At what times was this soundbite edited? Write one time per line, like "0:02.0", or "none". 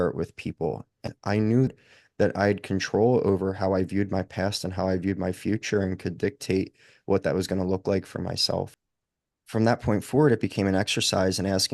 0:01.0
0:01.7
0:08.8